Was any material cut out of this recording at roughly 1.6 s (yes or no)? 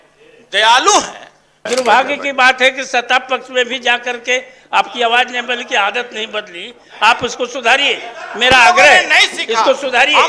yes